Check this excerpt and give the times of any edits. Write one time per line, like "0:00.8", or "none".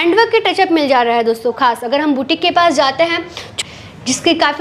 0:03.5